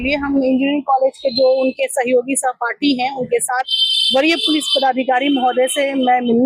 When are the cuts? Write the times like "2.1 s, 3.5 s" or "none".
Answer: none